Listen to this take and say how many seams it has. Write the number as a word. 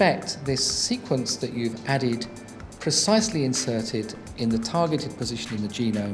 zero